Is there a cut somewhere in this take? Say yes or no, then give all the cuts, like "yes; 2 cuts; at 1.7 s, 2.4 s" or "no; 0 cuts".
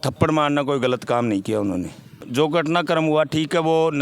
yes; 1 cut; at 2.2 s